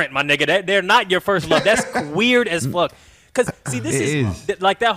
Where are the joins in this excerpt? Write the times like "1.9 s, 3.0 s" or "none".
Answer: none